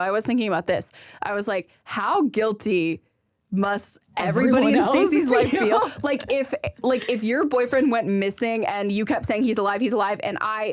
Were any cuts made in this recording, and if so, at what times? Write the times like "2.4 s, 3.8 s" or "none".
none